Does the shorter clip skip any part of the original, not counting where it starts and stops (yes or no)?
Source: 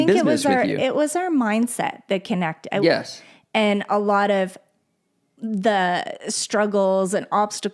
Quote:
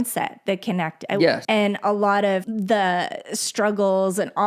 yes